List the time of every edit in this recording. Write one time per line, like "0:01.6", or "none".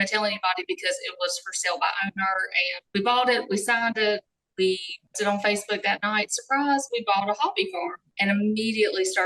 0:02.8